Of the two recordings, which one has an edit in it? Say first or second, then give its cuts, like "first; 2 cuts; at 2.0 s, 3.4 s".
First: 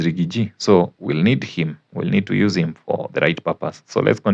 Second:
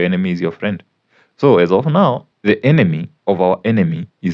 second; 2 cuts; at 2.3 s, 3.1 s